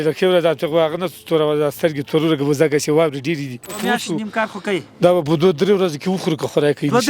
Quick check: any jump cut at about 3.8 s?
yes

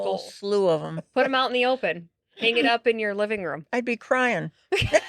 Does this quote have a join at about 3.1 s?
no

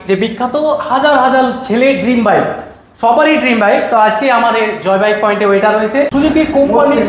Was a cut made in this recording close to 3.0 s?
no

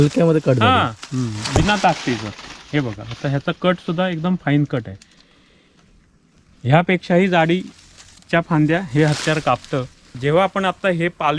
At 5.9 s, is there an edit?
no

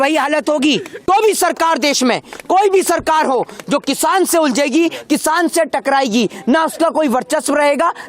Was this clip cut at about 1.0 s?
yes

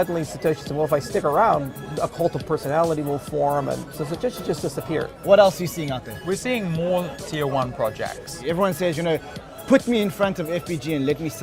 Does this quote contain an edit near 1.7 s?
no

